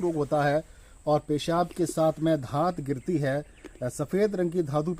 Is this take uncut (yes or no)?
yes